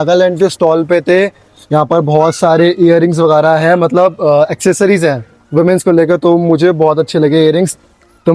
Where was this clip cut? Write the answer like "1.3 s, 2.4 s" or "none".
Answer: none